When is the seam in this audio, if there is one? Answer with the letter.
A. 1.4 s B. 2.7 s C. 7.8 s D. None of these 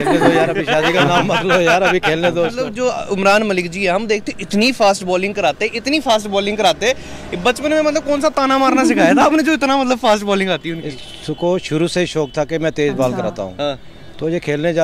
B